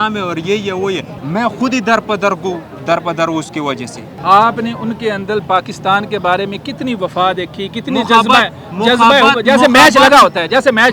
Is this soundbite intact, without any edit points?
no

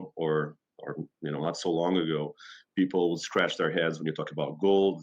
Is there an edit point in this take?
no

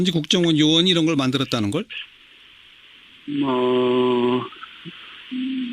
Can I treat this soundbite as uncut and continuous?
no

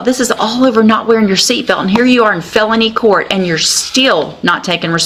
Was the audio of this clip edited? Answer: no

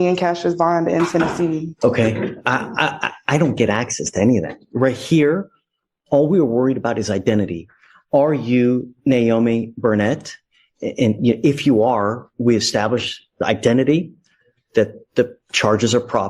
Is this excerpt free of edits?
no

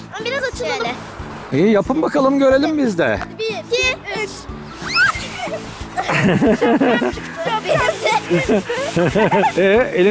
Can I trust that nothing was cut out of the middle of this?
yes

